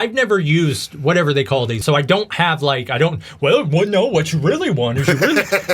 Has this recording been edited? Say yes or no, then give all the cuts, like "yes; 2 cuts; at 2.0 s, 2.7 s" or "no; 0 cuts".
yes; 1 cut; at 1.8 s